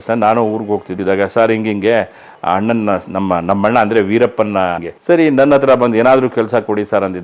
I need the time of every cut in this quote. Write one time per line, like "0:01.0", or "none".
0:00.9
0:04.9